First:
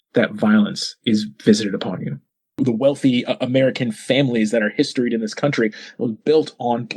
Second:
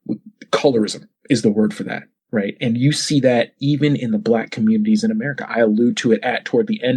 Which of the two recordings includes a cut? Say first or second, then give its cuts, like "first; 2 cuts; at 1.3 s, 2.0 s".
first; 1 cut; at 2.6 s